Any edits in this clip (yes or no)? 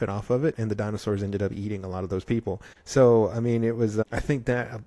yes